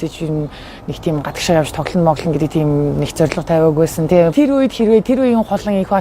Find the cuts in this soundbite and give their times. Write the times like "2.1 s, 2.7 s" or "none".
4.3 s